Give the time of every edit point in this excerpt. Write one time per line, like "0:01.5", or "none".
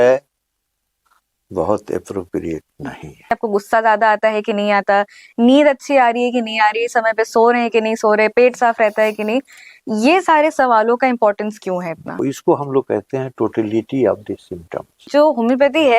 0:03.3
0:12.2
0:15.1